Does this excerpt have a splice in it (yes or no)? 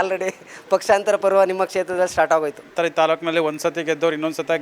yes